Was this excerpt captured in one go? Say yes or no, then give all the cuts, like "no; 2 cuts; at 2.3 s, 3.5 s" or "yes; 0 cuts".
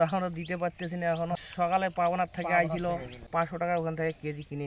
no; 2 cuts; at 1.4 s, 3.2 s